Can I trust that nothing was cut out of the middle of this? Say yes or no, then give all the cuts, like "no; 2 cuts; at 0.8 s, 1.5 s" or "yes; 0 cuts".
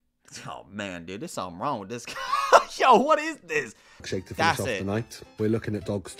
no; 1 cut; at 4.0 s